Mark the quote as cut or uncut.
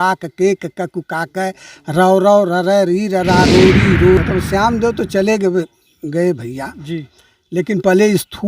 cut